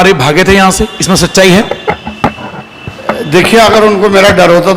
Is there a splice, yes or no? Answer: no